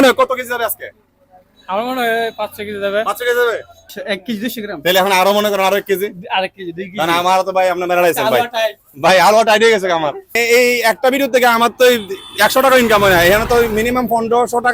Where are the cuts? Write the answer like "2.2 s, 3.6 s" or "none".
3.9 s, 10.4 s